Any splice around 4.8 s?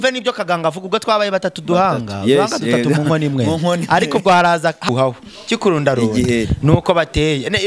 yes; 1 cut; at 4.8 s

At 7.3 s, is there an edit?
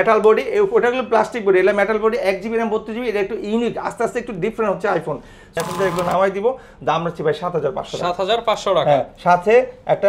no; 1 cut; at 5.5 s

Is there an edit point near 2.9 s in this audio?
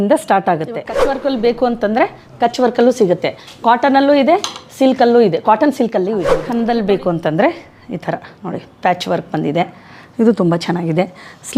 no; 2 cuts; at 1.0 s, 6.4 s

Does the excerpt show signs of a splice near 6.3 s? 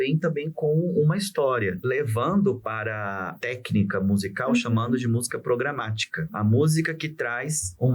yes; 3 cuts; at 1.8 s, 3.3 s, 6.3 s

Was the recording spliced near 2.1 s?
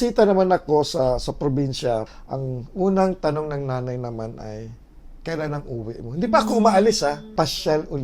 yes; 2 cuts; at 2.1 s, 7.2 s

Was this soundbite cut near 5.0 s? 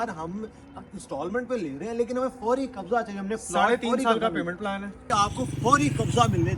yes; 1 cut; at 5.0 s

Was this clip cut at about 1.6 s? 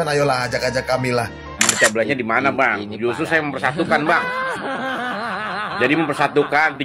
yes; 1 cut; at 1.6 s

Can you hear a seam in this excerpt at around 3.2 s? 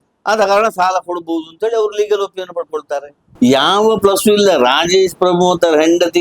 yes; 1 cut; at 3.2 s

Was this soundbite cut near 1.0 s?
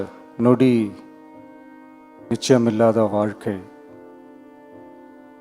no; 0 cuts

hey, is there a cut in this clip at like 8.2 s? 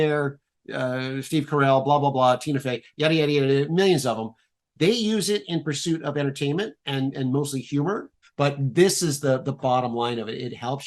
yes; 1 cut; at 8.2 s

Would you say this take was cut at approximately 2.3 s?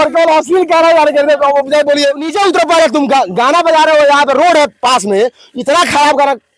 yes; 1 cut; at 2.3 s

